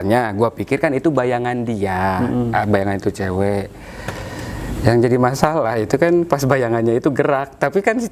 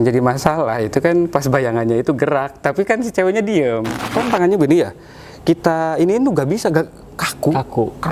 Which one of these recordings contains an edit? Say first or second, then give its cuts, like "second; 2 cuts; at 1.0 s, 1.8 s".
second; 1 cut; at 4.1 s